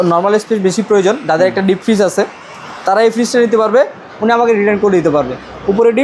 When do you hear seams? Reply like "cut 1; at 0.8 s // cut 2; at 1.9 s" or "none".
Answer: cut 1; at 4.0 s